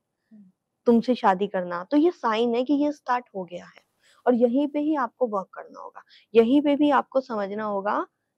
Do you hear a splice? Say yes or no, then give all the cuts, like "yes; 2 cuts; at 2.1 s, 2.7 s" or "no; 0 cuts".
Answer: no; 0 cuts